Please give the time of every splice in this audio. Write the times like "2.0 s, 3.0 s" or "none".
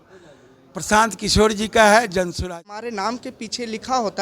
2.5 s